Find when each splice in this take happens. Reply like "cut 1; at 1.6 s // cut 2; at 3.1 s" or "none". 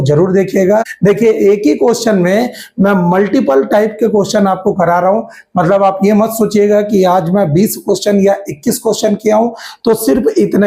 cut 1; at 0.9 s